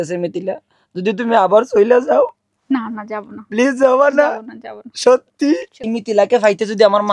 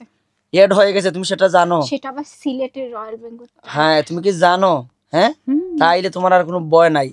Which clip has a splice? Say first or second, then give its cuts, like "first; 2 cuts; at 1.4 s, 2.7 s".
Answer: first; 1 cut; at 5.9 s